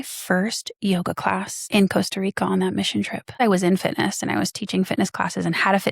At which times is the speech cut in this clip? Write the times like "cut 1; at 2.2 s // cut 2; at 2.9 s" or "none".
cut 1; at 1.5 s // cut 2; at 3.4 s